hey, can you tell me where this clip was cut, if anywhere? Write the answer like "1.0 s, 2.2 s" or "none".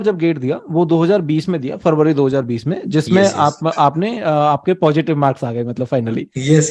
none